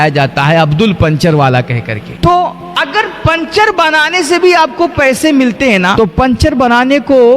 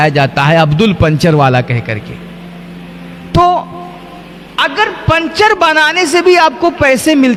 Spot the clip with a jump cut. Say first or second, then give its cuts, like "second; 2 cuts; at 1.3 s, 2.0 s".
first; 3 cuts; at 2.1 s, 2.6 s, 5.9 s